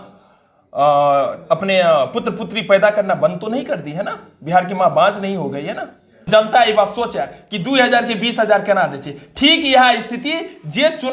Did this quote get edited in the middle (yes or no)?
yes